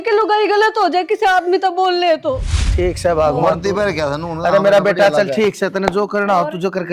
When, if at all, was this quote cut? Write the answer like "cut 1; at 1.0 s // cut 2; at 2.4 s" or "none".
cut 1; at 2.6 s